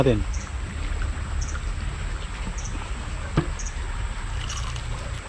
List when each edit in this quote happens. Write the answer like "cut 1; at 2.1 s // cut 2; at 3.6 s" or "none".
none